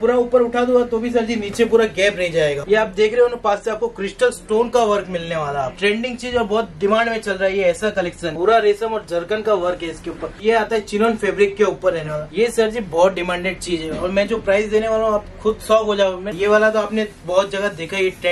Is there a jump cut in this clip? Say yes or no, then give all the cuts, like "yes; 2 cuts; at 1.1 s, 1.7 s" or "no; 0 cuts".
yes; 6 cuts; at 2.6 s, 5.7 s, 8.3 s, 10.4 s, 12.2 s, 16.3 s